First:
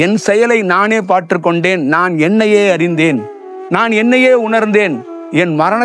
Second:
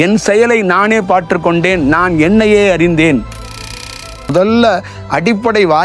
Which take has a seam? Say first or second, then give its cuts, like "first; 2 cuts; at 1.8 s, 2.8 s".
second; 1 cut; at 3.7 s